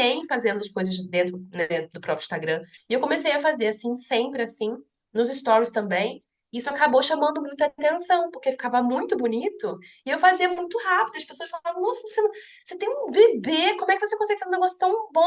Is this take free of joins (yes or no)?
no